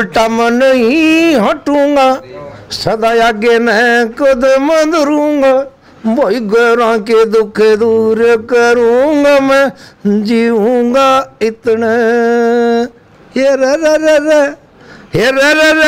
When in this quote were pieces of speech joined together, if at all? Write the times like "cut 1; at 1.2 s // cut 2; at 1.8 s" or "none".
none